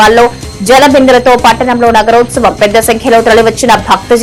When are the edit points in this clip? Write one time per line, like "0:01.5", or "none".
none